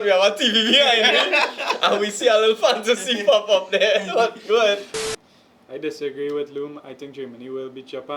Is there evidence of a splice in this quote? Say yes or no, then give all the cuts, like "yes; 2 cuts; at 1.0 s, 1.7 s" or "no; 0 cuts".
yes; 1 cut; at 5.0 s